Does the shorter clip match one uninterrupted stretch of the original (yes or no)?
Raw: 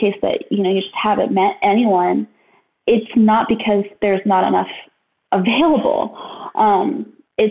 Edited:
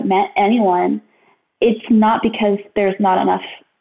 yes